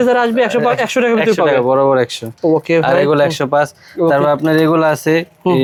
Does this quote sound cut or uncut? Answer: uncut